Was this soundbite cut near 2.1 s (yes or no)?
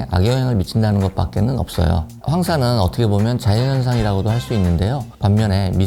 yes